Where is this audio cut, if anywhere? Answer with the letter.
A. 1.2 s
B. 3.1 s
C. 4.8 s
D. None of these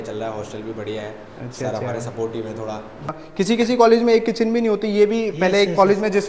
B